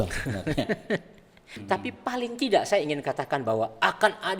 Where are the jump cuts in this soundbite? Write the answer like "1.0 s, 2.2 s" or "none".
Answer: 1.5 s